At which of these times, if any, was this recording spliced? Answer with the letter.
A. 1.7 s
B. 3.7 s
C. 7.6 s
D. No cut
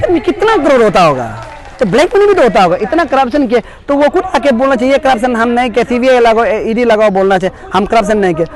D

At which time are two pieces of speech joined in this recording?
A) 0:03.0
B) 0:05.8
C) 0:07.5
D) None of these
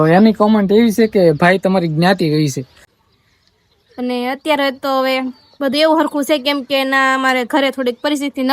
A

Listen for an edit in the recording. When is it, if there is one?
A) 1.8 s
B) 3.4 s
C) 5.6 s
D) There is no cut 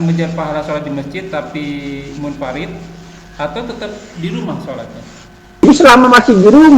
C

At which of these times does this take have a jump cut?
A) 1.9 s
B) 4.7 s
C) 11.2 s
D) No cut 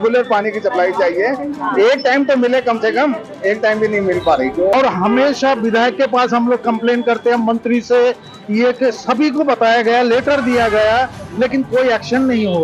B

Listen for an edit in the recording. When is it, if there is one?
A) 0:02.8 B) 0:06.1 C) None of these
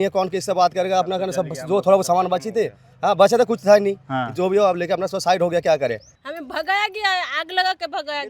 B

